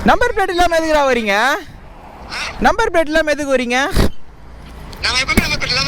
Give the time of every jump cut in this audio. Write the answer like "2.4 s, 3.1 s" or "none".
none